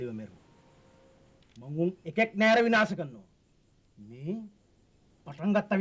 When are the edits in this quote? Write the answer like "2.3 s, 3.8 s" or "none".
none